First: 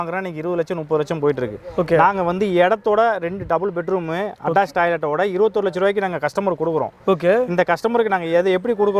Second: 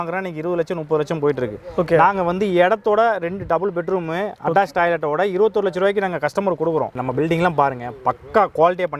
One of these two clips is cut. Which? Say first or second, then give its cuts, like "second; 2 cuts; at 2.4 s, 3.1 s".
second; 1 cut; at 7.0 s